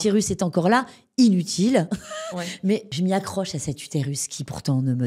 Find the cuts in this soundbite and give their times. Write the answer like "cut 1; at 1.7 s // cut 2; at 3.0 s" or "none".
cut 1; at 2.9 s